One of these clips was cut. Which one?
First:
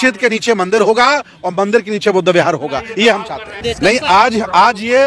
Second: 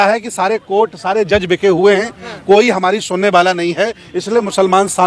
first; 1 cut; at 3.6 s

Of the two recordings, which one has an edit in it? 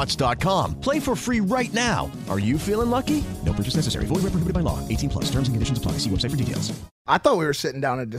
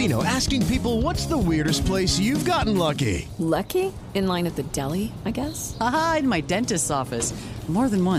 first; 1 cut; at 6.9 s

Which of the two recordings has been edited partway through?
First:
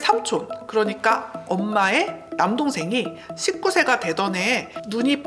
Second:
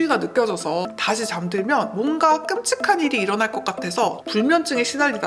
second; 2 cuts; at 0.9 s, 4.2 s

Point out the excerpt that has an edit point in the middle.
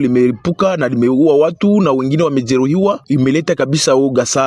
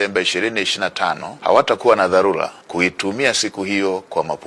second; 2 cuts; at 1.3 s, 2.6 s

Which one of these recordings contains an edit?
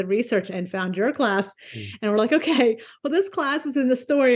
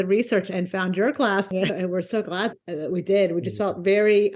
second; 1 cut; at 1.8 s

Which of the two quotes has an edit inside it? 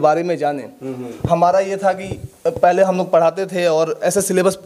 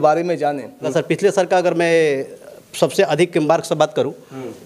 second; 1 cut; at 0.9 s

